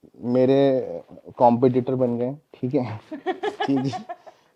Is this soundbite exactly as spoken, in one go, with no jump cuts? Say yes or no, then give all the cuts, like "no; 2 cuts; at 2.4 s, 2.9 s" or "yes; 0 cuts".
yes; 0 cuts